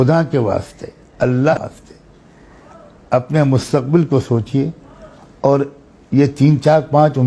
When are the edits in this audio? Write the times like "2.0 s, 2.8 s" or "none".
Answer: 1.5 s